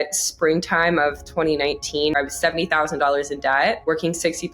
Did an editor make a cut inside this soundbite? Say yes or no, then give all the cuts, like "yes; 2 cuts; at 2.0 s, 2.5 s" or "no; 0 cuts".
yes; 2 cuts; at 2.1 s, 3.8 s